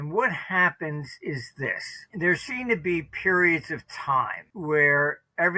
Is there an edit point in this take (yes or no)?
yes